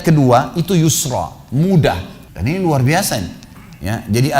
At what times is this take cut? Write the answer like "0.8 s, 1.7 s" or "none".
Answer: 2.1 s